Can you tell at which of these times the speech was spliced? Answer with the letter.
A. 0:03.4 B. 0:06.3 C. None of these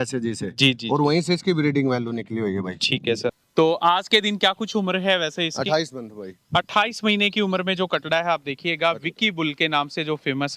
A